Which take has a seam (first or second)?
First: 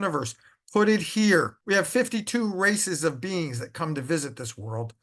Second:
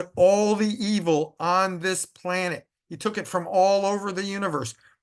first